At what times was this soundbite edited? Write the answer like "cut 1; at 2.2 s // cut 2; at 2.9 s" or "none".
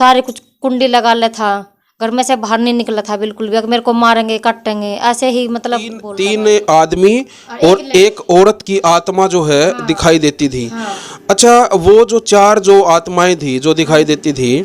cut 1; at 6.0 s